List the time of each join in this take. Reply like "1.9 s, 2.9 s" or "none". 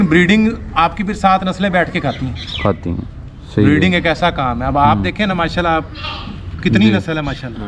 none